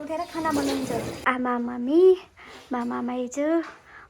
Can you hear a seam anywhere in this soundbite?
yes; 1 cut; at 1.1 s

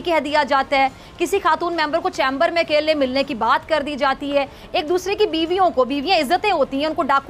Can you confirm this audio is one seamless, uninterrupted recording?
yes; 0 cuts

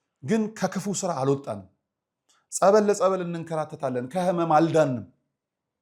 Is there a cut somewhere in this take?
no; 0 cuts

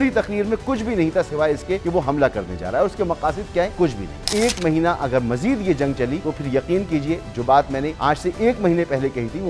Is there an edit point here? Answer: yes; 4 cuts; at 1.8 s, 4.0 s, 6.2 s, 7.9 s

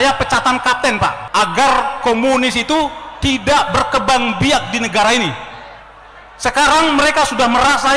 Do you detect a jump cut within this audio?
yes; 1 cut; at 1.2 s

